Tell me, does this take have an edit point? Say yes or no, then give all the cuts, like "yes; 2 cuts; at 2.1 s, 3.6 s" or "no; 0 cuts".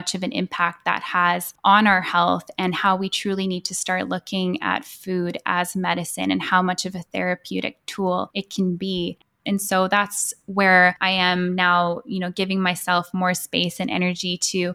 yes; 1 cut; at 9.3 s